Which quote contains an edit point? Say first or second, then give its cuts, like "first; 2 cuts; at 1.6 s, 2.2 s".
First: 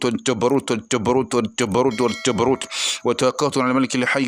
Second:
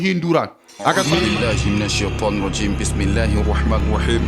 second; 1 cut; at 1.2 s